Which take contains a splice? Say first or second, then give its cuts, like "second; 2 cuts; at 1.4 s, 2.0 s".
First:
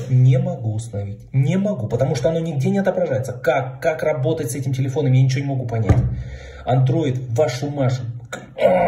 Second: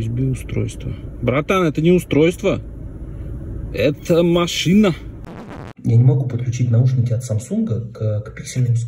second; 1 cut; at 5.3 s